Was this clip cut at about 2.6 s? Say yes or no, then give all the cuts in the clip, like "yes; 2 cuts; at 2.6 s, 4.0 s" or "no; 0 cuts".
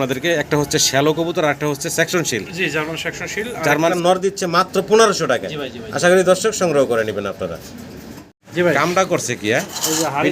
no; 2 cuts; at 3.9 s, 8.3 s